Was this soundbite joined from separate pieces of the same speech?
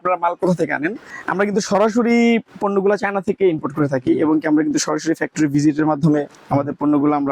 yes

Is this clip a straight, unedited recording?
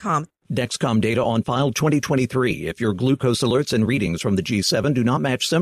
yes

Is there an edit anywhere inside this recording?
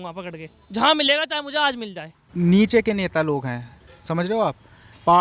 yes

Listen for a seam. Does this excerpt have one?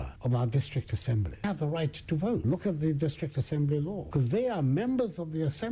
yes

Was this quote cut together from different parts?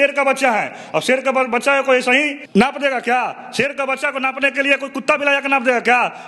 no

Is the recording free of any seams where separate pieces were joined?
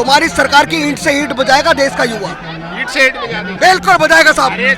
yes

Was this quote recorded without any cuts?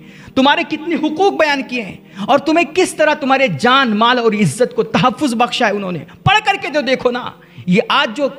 yes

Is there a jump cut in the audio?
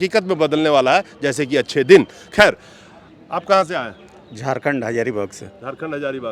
no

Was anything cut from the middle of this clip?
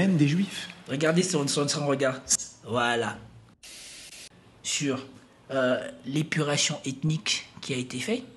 yes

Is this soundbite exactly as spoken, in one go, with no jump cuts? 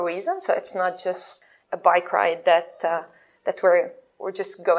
no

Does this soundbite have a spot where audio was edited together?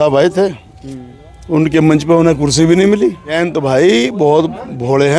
yes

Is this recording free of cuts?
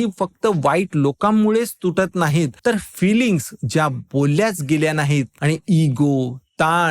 no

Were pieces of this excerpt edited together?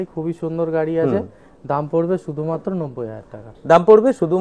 no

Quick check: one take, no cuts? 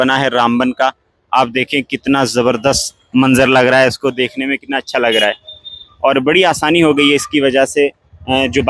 yes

